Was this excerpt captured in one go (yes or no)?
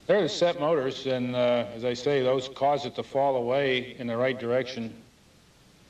no